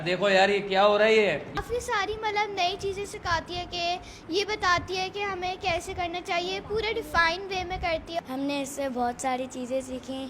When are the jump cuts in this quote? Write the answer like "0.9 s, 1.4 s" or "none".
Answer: 1.6 s, 8.2 s